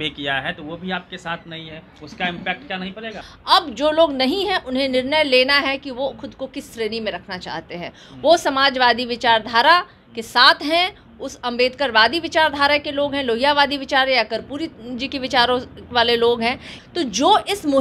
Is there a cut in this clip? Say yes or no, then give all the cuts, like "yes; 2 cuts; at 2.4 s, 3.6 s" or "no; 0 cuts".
yes; 2 cuts; at 3.2 s, 16.7 s